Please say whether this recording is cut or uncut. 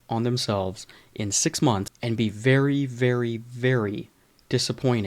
cut